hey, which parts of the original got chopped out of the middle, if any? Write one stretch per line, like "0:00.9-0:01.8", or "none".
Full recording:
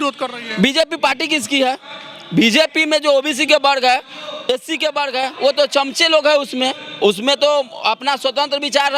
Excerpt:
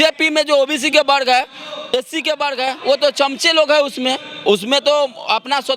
none